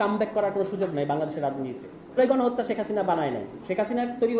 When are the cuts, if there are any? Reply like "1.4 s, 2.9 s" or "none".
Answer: 2.2 s